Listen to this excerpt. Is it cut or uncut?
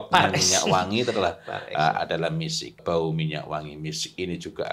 cut